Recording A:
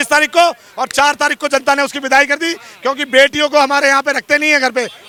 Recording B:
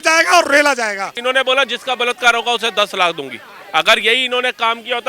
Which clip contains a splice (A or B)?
B